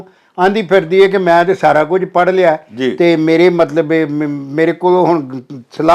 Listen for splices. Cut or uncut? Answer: uncut